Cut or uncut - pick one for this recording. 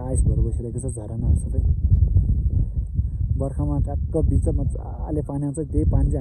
uncut